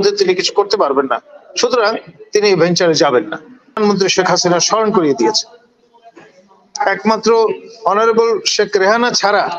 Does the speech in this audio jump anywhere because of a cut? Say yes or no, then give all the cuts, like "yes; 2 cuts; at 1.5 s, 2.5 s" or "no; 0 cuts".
yes; 1 cut; at 3.8 s